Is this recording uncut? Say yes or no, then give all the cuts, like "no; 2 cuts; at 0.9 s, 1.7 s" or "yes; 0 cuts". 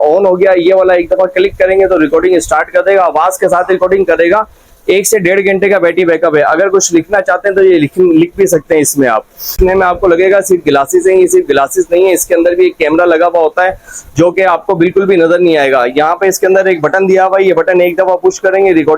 no; 1 cut; at 9.6 s